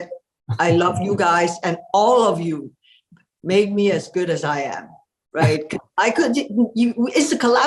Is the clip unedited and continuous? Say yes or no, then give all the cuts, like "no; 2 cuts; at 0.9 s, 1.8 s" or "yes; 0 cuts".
yes; 0 cuts